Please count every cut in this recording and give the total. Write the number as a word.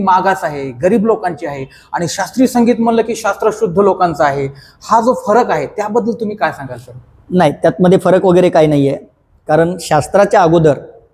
zero